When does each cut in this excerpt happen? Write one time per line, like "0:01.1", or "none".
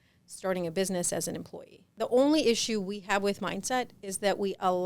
0:01.9